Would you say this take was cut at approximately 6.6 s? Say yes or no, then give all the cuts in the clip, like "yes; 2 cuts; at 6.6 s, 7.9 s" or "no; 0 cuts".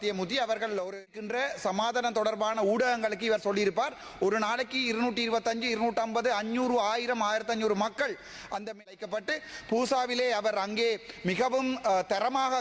no; 2 cuts; at 1.2 s, 8.8 s